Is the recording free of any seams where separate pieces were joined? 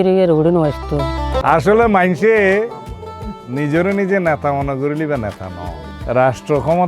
no; 1 cut; at 1.4 s

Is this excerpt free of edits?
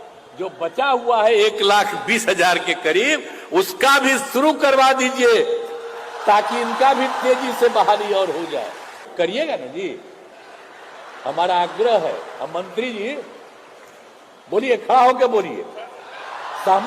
no; 1 cut; at 9.1 s

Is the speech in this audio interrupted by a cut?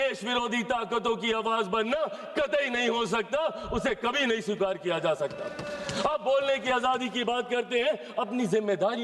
no; 0 cuts

